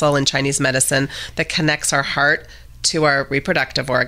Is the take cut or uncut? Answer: uncut